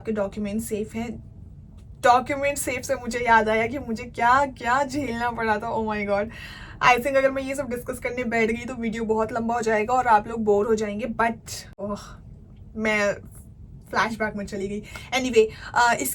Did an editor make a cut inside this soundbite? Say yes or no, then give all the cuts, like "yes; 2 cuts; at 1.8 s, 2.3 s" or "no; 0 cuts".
yes; 1 cut; at 11.6 s